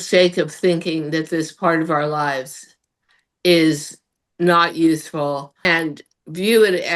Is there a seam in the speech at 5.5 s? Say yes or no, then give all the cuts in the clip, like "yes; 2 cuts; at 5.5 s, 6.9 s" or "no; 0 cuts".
yes; 1 cut; at 5.5 s